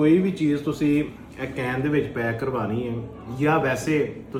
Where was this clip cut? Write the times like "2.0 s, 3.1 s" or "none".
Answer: none